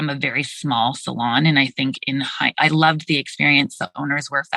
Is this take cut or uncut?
uncut